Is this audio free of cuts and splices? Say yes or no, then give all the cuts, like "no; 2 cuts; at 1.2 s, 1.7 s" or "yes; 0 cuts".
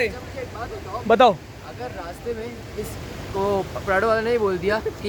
yes; 0 cuts